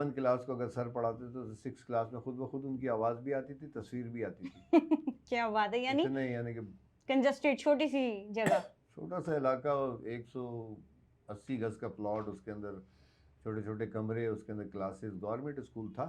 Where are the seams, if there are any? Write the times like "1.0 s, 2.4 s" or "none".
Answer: none